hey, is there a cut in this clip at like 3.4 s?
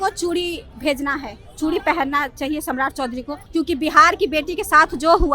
yes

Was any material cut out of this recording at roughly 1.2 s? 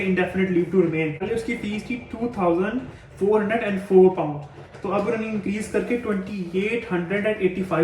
yes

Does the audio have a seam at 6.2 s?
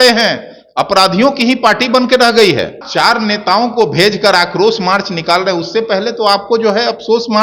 no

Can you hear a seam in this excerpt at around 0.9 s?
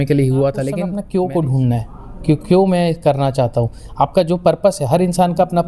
yes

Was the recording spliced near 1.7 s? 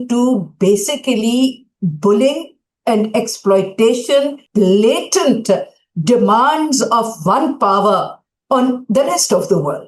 no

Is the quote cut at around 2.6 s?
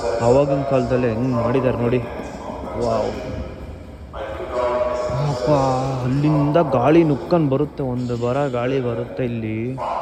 no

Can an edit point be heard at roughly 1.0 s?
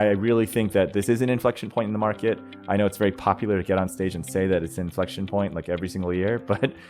yes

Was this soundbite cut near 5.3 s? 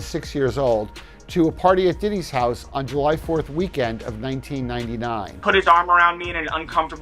yes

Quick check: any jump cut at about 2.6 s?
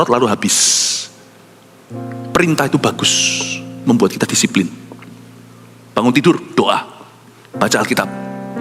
yes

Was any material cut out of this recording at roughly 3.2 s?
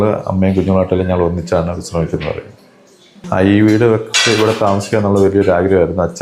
yes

